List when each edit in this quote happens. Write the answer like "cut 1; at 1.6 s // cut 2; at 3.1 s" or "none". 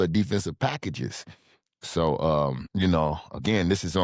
cut 1; at 2.6 s